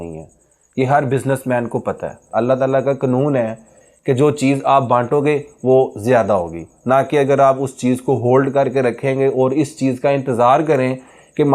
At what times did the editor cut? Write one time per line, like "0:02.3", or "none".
0:02.1